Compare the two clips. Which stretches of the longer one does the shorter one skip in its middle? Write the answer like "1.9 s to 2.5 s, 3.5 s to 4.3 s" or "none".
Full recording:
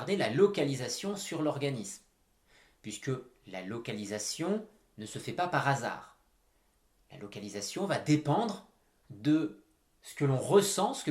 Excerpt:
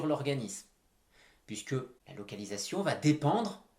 3.4 s to 7.0 s